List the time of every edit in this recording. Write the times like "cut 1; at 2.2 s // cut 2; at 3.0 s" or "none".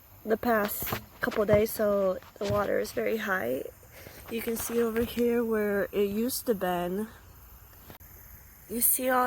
cut 1; at 8.0 s